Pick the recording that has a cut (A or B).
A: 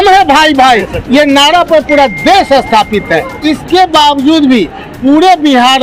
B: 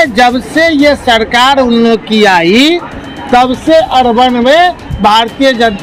A